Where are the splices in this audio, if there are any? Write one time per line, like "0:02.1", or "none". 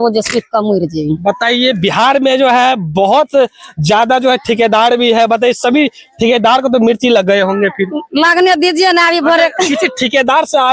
none